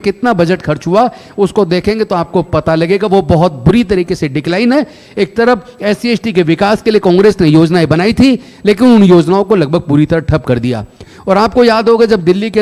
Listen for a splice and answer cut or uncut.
uncut